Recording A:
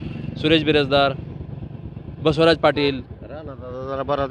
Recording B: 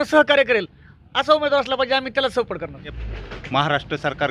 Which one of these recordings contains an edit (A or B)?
B